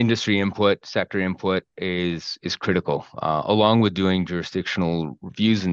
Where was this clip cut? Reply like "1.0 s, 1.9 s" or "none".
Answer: none